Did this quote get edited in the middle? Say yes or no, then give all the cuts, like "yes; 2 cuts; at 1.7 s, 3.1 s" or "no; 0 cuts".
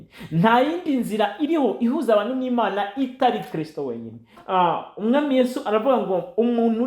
yes; 1 cut; at 4.4 s